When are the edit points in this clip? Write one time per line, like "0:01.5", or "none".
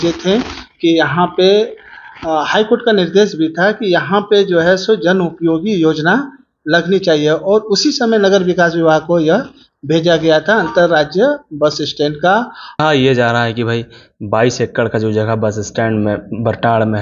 0:12.8